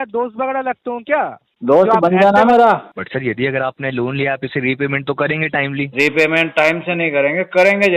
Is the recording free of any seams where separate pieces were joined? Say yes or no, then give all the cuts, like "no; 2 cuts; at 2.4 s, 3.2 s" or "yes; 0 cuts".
no; 1 cut; at 2.9 s